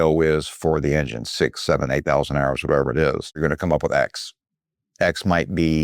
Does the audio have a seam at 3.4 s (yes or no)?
yes